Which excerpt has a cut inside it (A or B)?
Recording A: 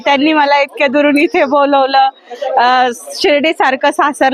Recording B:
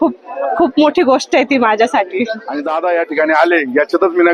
B